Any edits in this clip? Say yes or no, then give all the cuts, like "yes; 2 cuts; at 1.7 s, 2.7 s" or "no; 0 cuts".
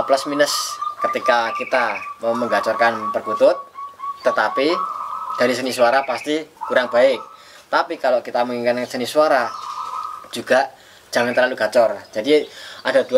no; 0 cuts